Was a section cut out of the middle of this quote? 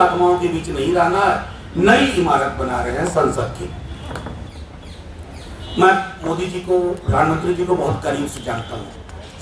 yes; 1 cut; at 4.5 s

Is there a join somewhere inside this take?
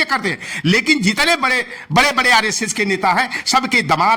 no; 0 cuts

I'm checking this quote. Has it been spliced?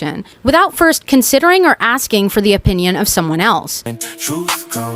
yes; 1 cut; at 3.8 s

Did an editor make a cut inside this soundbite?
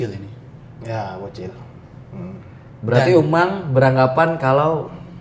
yes; 1 cut; at 2.6 s

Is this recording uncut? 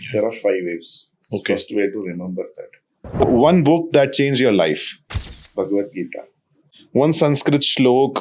no; 1 cut; at 3.2 s

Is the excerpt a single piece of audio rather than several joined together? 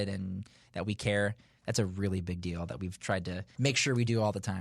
no; 1 cut; at 3.5 s

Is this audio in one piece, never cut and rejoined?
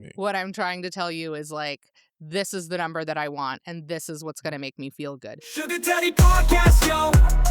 no; 1 cut; at 5.4 s

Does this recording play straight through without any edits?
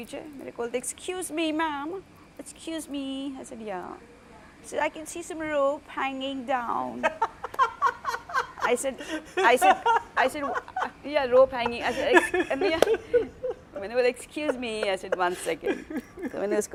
yes; 0 cuts

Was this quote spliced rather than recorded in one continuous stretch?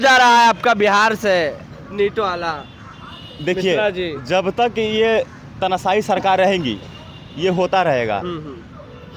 no; 0 cuts

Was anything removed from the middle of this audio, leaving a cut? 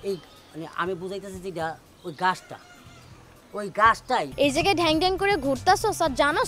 yes; 1 cut; at 4.3 s

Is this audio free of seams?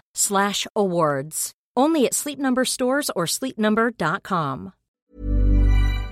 no; 1 cut; at 5.1 s

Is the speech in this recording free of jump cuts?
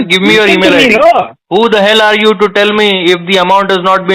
no; 1 cut; at 1.4 s

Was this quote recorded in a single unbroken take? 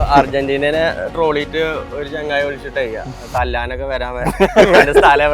yes; 0 cuts

